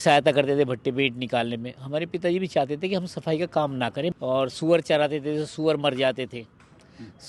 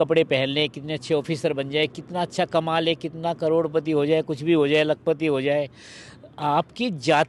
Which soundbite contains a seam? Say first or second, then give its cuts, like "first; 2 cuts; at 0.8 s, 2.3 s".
first; 1 cut; at 4.2 s